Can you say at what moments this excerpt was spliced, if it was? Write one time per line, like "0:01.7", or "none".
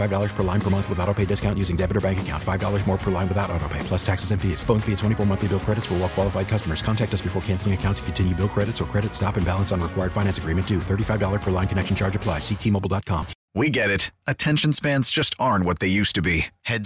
0:13.4